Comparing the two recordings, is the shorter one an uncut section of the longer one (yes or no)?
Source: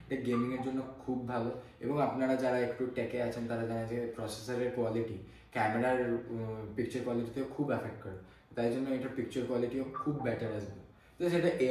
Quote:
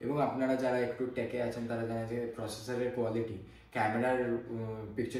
yes